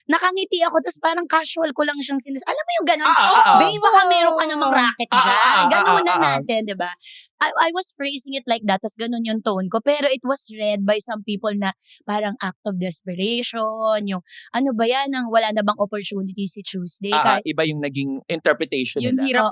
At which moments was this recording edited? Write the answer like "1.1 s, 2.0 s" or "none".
none

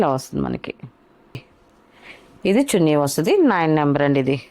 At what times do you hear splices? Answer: 1.3 s

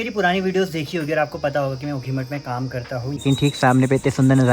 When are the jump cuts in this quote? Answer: 3.2 s

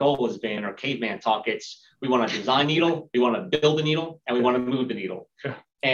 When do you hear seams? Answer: none

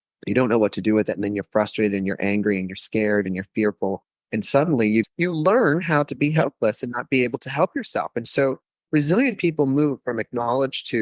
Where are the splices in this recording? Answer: 5.1 s

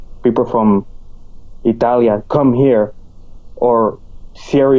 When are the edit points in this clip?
none

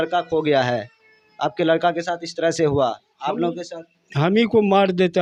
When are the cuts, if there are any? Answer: none

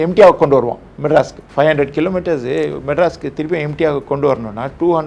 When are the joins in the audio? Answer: 1.4 s

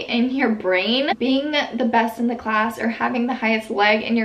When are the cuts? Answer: none

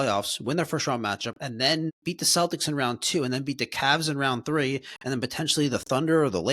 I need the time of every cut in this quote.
2.0 s

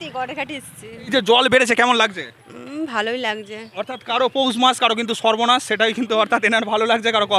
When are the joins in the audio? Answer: 1.1 s

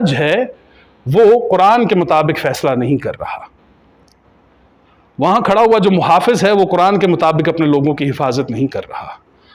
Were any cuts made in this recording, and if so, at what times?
none

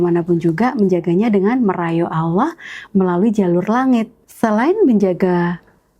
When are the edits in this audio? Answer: 4.2 s

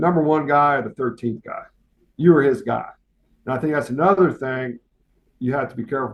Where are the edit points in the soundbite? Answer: none

